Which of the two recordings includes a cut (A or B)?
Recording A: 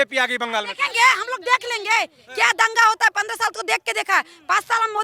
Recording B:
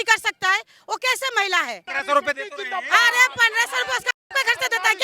B